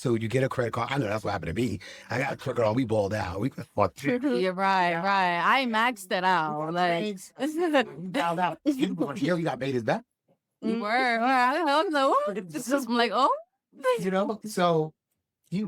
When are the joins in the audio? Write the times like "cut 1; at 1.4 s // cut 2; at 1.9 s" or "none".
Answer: none